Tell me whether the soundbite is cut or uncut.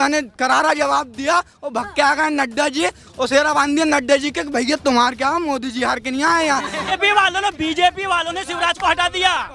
cut